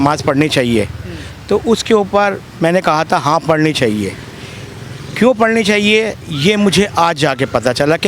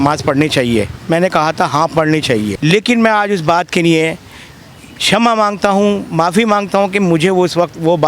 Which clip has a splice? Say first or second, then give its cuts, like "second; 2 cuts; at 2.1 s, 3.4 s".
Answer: second; 2 cuts; at 1.0 s, 2.5 s